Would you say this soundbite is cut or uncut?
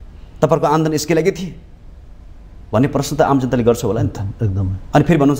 uncut